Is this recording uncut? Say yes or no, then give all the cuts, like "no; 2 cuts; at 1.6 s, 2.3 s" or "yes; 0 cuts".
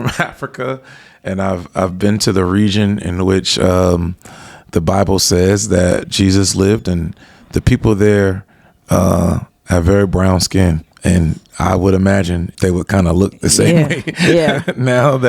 no; 2 cuts; at 10.9 s, 12.5 s